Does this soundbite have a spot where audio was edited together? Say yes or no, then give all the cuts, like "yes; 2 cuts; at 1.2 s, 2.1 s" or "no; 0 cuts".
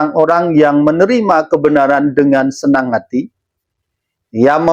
no; 0 cuts